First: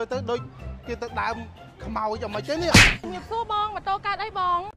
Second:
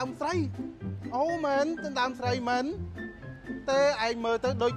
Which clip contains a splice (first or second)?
first